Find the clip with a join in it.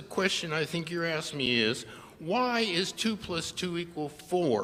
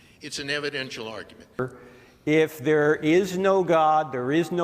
second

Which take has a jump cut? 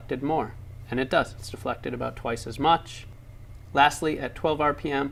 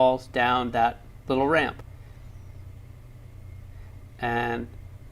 second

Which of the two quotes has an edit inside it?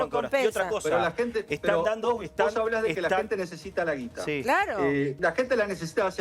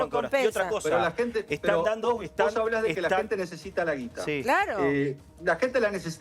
first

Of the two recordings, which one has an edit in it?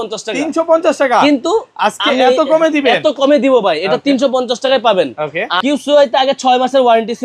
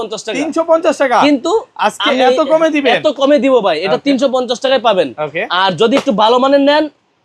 first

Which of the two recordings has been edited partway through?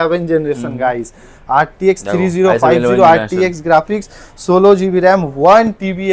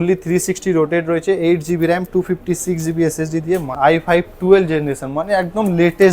second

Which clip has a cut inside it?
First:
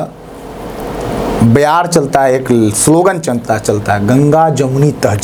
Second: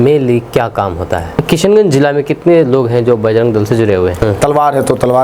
second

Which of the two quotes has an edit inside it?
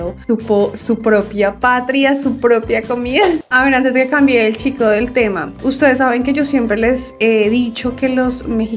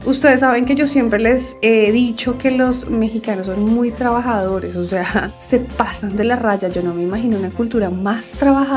first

